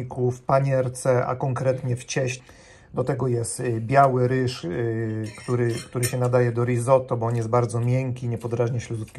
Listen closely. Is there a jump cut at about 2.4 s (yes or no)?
yes